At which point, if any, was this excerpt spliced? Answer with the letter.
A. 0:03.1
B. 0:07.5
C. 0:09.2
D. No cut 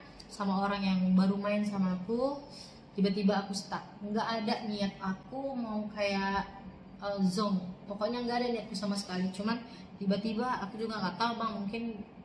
D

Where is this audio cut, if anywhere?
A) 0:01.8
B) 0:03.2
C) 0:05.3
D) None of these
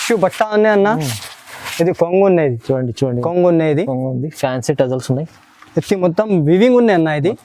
B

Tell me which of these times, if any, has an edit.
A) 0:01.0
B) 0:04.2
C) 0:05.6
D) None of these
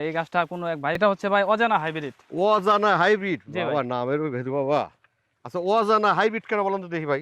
A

